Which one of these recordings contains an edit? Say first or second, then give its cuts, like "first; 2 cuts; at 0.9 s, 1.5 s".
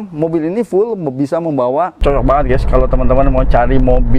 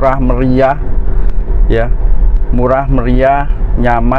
first; 1 cut; at 2.0 s